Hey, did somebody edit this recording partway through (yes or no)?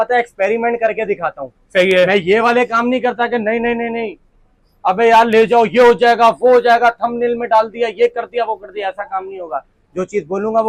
no